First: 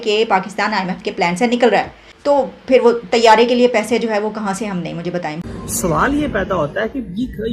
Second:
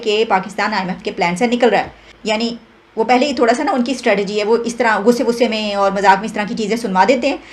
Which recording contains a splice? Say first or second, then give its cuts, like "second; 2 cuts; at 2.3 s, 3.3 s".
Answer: first; 2 cuts; at 2.2 s, 5.4 s